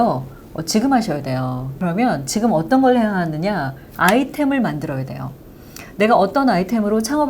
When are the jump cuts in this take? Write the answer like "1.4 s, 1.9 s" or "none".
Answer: 1.7 s

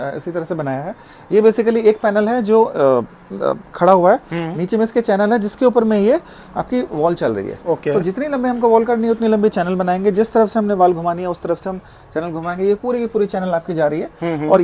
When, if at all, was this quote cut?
none

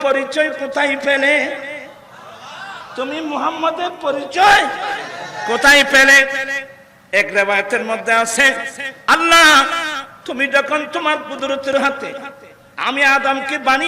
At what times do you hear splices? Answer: none

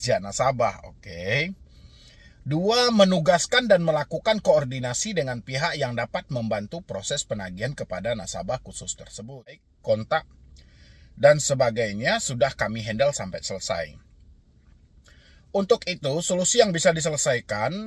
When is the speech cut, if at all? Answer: 9.7 s

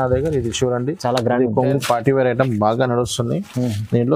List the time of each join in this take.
1.8 s

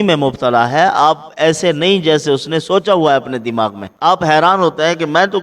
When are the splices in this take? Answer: 3.9 s

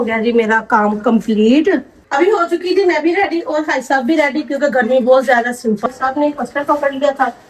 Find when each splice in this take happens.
2.0 s, 5.9 s

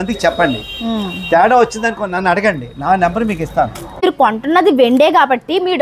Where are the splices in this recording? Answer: 3.8 s

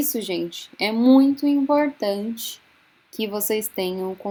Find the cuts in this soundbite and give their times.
none

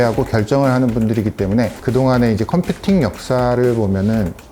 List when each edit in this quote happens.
1.8 s

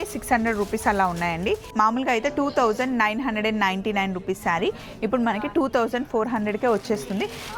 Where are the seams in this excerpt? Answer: 1.7 s

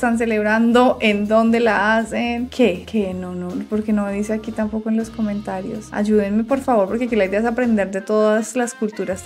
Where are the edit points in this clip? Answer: none

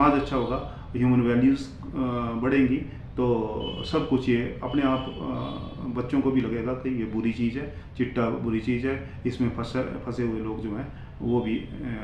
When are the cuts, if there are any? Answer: none

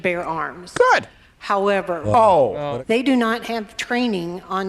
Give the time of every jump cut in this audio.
2.6 s

